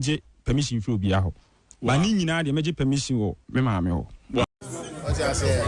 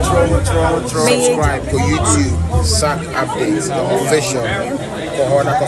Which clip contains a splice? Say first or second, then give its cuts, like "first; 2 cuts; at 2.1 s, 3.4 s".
first; 1 cut; at 4.4 s